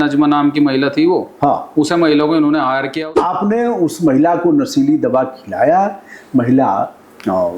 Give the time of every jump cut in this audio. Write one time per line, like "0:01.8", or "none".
0:03.1